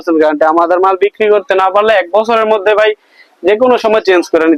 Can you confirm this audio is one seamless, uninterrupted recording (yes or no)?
yes